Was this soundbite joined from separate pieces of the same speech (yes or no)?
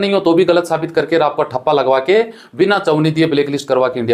no